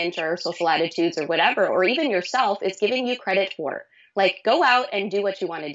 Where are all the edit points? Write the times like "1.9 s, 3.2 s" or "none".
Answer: none

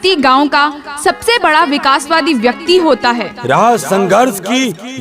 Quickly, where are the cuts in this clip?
3.3 s

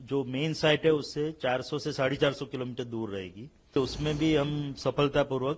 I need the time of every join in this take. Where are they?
3.8 s

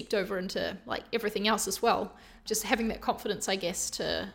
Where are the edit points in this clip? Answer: 2.4 s

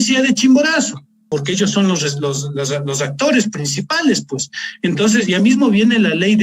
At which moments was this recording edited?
1.3 s

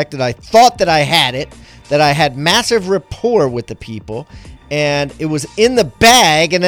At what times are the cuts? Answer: none

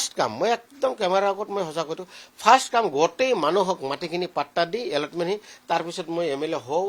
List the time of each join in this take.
none

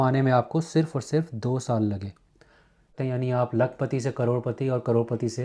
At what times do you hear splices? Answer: 2.9 s

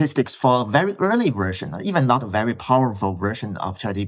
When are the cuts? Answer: none

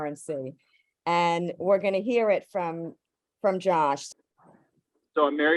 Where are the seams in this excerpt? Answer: 4.0 s

